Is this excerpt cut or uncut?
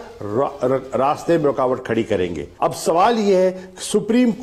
cut